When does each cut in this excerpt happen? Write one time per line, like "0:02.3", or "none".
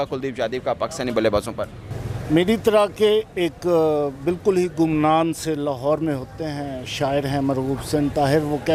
none

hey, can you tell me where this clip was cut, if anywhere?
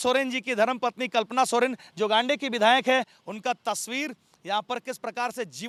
none

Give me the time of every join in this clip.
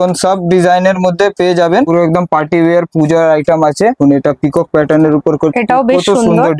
0:01.9
0:04.0

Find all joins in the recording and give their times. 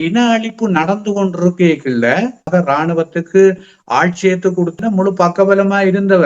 0:02.5
0:04.8

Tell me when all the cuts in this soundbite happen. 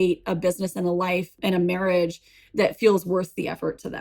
0:01.3

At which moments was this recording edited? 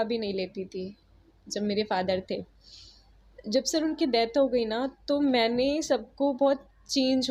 none

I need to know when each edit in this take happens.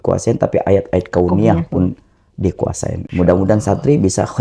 0:03.0

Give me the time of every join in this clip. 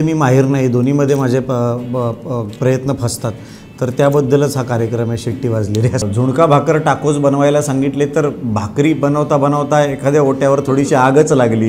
0:06.0

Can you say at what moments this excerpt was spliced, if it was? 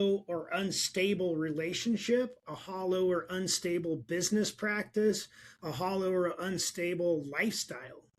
none

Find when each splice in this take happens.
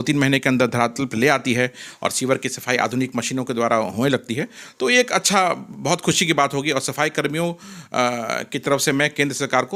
none

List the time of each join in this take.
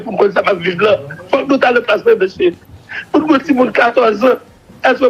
none

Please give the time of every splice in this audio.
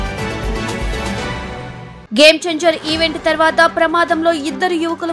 0:01.8

